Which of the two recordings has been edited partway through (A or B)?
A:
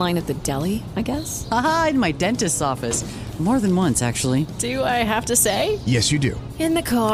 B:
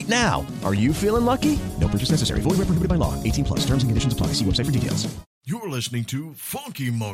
B